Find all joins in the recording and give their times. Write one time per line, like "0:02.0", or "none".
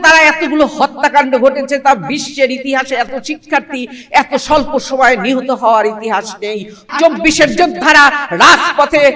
0:06.9